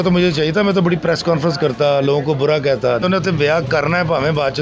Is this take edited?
yes; 1 cut; at 3.0 s

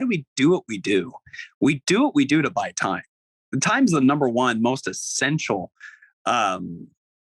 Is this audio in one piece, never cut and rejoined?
yes; 0 cuts

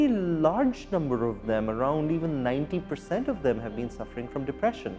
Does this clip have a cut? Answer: no; 0 cuts

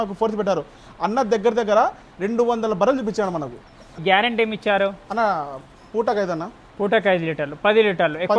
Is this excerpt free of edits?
no; 1 cut; at 4.0 s

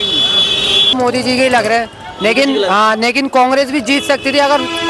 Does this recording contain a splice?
yes; 1 cut; at 1.0 s

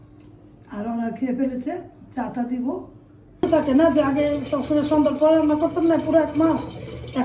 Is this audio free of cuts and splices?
no; 1 cut; at 3.4 s

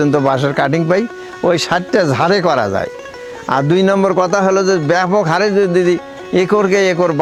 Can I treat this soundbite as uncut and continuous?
yes; 0 cuts

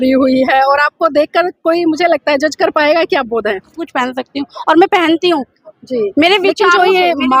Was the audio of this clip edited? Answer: yes; 1 cut; at 3.8 s

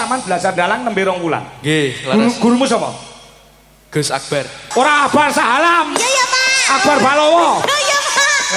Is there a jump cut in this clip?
yes; 1 cut; at 4.6 s

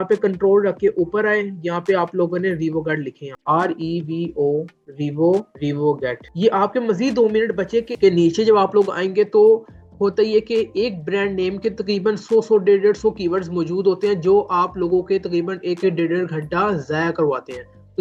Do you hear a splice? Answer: no; 0 cuts

